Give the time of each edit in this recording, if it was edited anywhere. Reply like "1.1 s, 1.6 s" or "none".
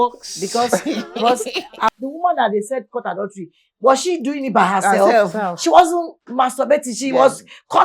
2.0 s